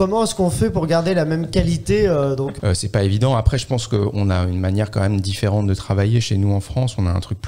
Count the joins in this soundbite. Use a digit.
1